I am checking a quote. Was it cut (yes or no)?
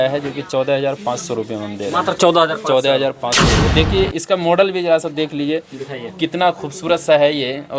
yes